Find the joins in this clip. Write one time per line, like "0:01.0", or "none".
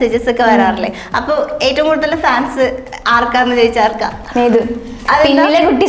none